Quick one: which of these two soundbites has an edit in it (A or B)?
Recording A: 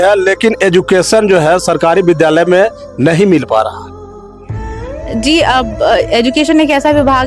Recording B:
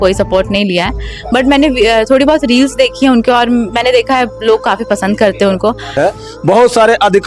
B